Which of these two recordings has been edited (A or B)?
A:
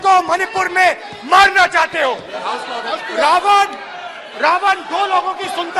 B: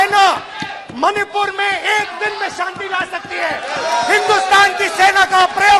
A